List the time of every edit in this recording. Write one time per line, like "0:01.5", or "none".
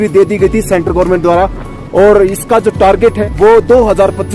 0:03.2